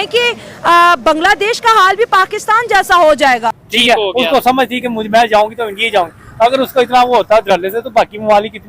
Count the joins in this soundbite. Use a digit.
1